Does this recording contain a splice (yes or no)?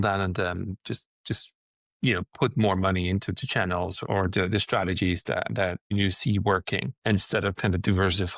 yes